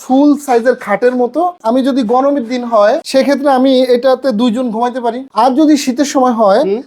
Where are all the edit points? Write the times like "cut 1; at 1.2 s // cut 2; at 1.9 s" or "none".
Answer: cut 1; at 1.6 s // cut 2; at 3.0 s // cut 3; at 5.3 s